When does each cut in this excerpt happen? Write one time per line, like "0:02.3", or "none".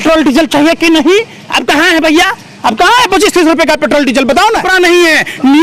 0:04.7